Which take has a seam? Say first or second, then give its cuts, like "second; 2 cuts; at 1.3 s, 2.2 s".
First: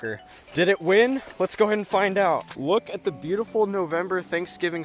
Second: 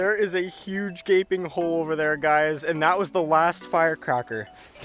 first; 1 cut; at 2.5 s